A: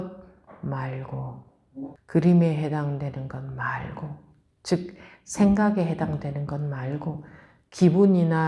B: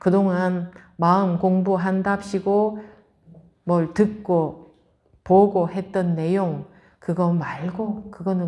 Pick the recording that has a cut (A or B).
A